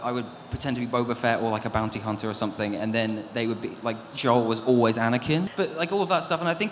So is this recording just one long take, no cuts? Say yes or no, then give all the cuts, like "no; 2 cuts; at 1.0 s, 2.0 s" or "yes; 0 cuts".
no; 1 cut; at 5.5 s